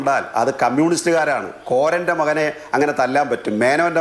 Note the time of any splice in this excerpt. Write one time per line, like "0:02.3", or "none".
none